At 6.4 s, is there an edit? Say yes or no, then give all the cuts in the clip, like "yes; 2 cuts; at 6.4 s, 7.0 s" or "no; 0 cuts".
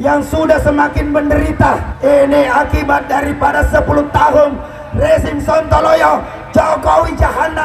no; 1 cut; at 1.9 s